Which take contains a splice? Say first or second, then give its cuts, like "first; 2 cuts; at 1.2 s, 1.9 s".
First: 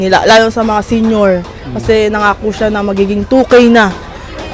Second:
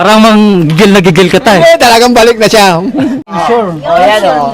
second; 1 cut; at 3.4 s